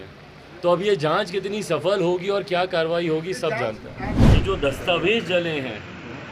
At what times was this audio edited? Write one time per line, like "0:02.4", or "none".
0:04.1